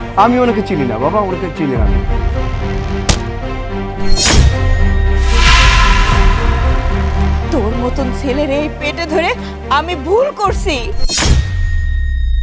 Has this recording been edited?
yes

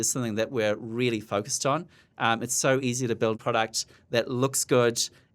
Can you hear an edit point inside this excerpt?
yes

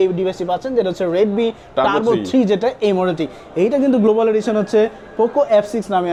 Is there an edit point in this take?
no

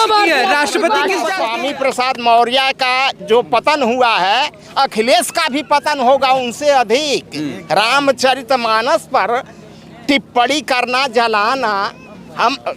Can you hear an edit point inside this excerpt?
yes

